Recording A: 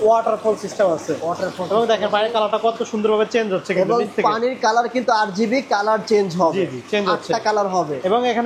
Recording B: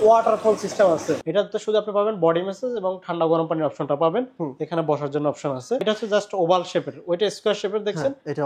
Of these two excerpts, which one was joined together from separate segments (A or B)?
B